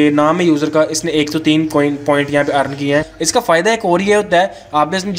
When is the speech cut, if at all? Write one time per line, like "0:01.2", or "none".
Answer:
0:03.2